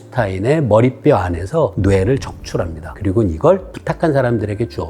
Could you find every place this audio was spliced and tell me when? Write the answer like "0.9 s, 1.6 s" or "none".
1.8 s, 2.8 s, 3.7 s